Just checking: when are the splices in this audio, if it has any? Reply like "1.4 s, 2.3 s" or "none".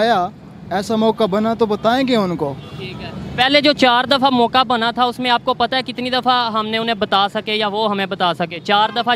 none